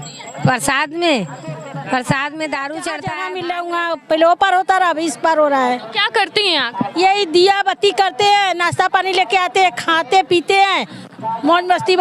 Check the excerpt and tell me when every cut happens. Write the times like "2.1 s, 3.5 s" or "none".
3.2 s

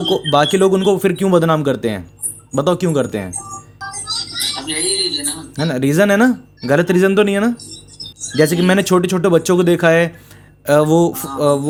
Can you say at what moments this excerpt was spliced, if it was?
none

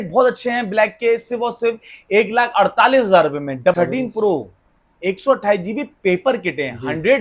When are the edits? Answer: 3.8 s

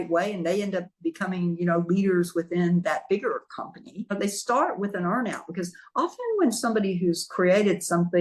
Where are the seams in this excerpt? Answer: 4.1 s

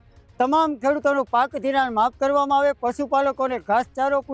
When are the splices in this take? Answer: none

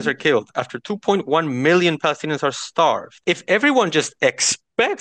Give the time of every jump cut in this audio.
3.1 s

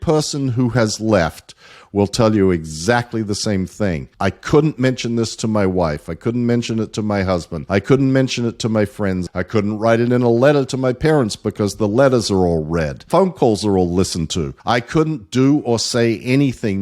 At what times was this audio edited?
4.1 s, 7.5 s, 9.3 s, 13.0 s, 14.5 s

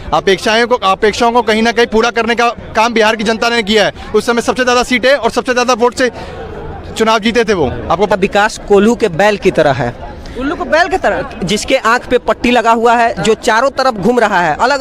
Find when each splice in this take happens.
8.1 s

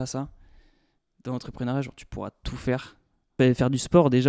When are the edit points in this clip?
3.3 s

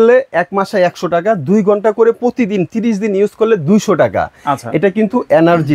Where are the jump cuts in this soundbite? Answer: none

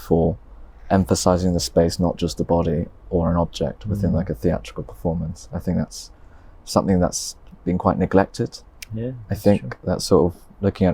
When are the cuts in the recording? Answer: none

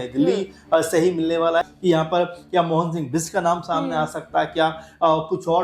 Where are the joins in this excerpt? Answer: 1.7 s

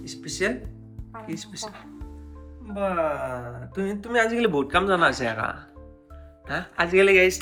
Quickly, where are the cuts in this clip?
none

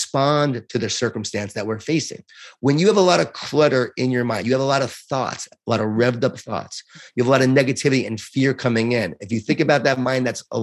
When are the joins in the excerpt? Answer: none

